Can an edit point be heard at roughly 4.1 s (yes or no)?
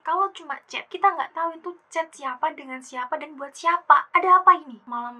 yes